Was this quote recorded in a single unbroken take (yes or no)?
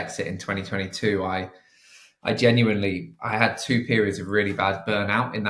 yes